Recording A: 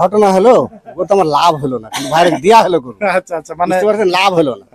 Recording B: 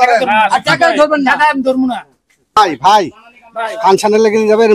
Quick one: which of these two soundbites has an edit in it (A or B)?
B